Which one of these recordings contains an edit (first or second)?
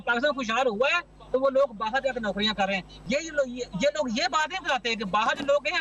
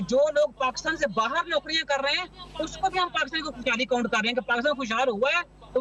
first